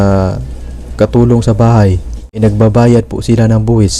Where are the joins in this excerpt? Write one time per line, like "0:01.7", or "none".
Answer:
0:02.4